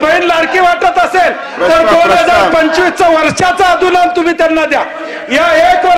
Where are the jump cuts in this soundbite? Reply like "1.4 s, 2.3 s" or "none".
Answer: none